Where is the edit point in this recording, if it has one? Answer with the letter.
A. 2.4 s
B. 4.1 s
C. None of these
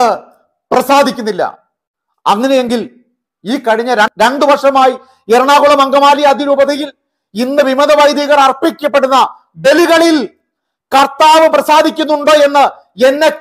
B